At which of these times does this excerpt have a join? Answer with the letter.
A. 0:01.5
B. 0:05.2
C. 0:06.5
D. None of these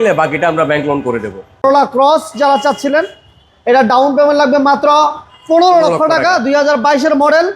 A